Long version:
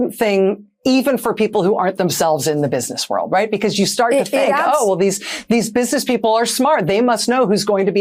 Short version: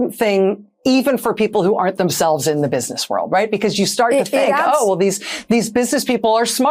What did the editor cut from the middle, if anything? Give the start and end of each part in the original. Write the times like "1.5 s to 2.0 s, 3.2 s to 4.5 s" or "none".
none